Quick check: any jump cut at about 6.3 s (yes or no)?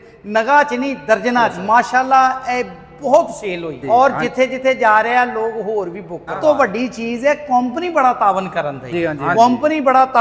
yes